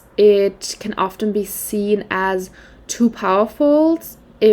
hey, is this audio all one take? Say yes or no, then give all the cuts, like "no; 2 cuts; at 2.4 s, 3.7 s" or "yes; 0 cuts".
yes; 0 cuts